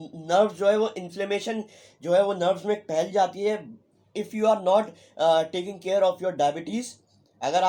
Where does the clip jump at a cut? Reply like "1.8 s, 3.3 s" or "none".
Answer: none